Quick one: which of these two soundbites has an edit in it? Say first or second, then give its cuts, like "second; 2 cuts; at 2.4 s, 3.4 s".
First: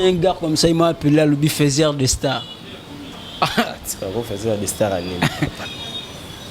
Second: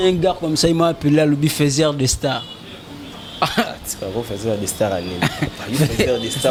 first; 1 cut; at 5.6 s